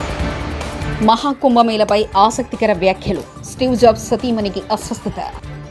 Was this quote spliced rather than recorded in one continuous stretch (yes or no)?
yes